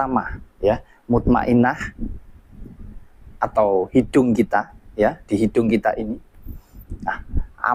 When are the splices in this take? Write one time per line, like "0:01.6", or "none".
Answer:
none